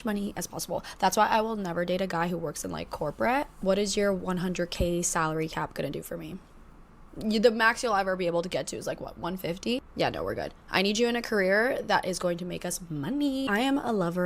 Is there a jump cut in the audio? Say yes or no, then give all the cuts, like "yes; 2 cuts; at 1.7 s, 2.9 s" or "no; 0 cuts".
yes; 1 cut; at 8.6 s